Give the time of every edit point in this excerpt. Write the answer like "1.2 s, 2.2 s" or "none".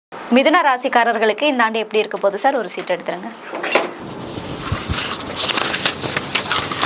none